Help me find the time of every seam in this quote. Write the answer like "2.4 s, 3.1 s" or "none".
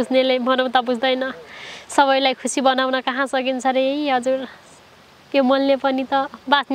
none